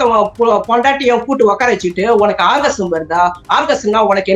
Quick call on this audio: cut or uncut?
uncut